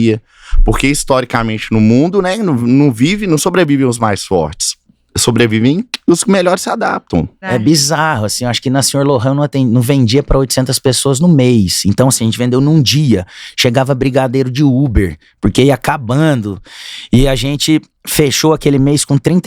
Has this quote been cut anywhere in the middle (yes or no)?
yes